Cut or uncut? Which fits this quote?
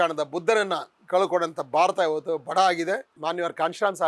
cut